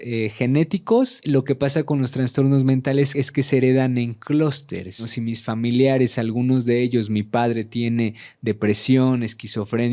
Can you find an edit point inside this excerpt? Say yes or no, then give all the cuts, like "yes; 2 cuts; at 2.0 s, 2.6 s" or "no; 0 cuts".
yes; 3 cuts; at 1.2 s, 3.1 s, 5.1 s